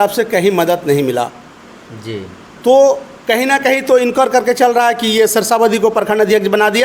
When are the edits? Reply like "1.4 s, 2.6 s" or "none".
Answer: none